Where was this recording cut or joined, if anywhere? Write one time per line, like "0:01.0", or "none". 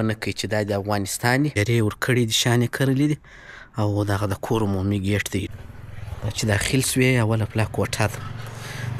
0:01.5
0:05.5